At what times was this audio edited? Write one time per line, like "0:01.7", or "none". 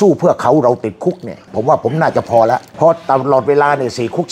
none